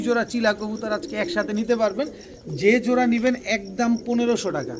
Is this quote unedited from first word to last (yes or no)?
yes